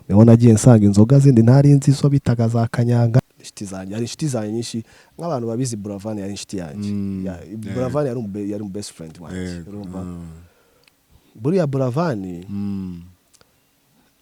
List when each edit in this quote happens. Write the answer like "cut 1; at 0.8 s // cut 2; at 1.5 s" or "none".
cut 1; at 3.2 s